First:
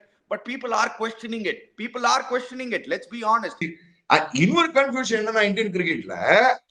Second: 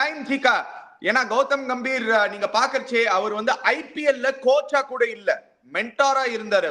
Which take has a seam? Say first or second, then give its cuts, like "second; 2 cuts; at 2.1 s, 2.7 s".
first; 1 cut; at 3.7 s